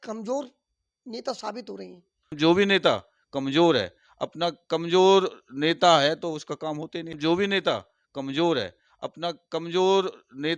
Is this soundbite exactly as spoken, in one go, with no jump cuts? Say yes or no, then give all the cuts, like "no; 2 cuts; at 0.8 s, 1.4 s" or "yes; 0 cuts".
no; 2 cuts; at 2.3 s, 7.1 s